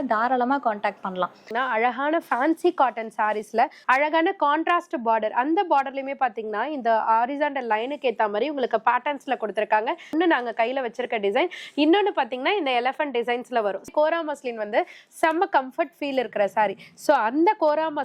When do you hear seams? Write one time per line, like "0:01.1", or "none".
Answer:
0:01.5
0:03.8
0:10.1
0:13.9